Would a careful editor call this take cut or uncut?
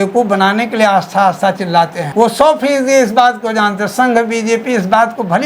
cut